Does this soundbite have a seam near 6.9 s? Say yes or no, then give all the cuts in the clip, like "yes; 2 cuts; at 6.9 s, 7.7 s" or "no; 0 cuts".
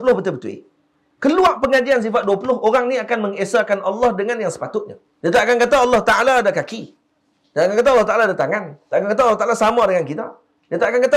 no; 1 cut; at 5.0 s